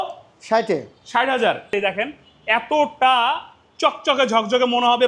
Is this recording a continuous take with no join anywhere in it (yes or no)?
no